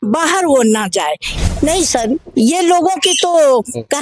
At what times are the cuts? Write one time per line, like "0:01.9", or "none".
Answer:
0:01.3